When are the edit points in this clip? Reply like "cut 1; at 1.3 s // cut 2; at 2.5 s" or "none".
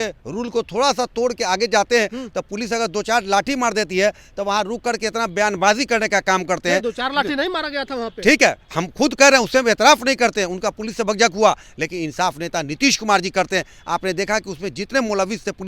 none

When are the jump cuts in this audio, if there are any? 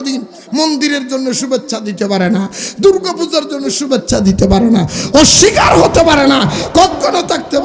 none

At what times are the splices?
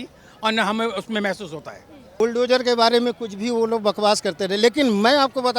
cut 1; at 2.2 s

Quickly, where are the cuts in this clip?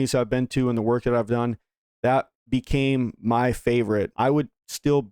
none

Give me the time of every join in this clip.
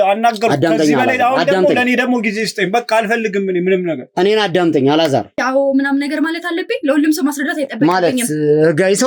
cut 1; at 5.4 s

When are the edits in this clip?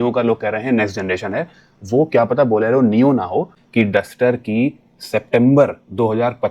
cut 1; at 3.6 s

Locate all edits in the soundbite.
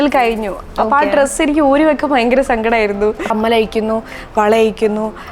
cut 1; at 3.3 s

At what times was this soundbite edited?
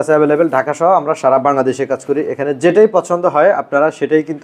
none

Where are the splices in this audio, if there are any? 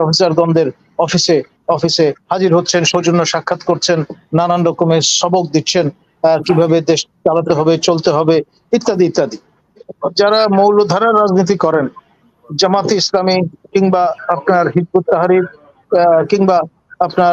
cut 1; at 9.8 s

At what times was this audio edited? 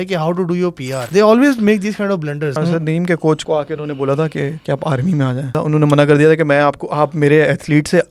cut 1; at 1.0 s // cut 2; at 2.6 s // cut 3; at 3.4 s // cut 4; at 4.6 s // cut 5; at 5.6 s

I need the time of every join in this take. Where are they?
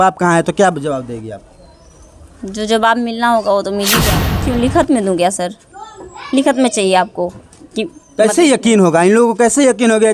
cut 1; at 4.0 s

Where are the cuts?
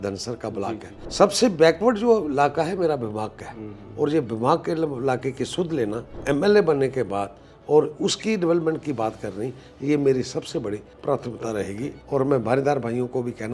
cut 1; at 1.0 s // cut 2; at 6.1 s // cut 3; at 10.9 s // cut 4; at 11.9 s

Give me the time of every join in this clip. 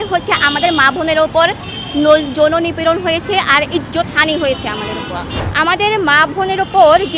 cut 1; at 5.4 s

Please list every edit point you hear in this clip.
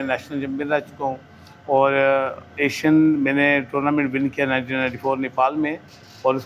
none

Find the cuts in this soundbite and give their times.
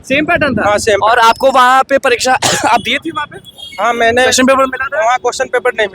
none

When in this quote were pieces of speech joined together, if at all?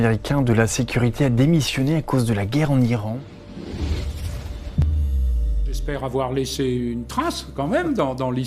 cut 1; at 3.1 s // cut 2; at 6.1 s

